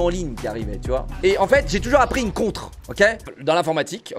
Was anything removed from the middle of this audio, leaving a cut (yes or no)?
yes